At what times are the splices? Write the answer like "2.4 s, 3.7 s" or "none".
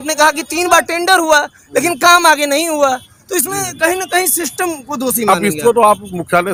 none